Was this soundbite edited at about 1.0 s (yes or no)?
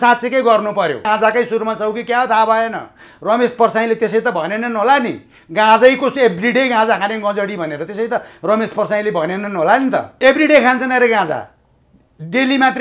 yes